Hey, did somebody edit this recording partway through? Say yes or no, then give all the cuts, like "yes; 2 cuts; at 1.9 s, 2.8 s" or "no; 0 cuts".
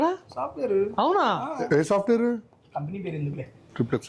yes; 1 cut; at 1.6 s